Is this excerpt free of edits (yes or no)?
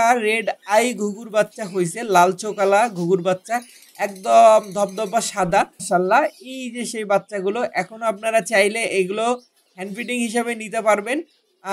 no